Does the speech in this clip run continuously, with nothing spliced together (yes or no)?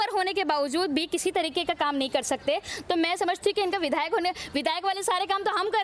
yes